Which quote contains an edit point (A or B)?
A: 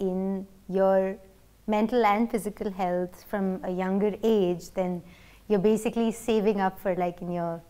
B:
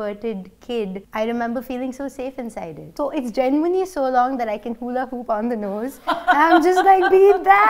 B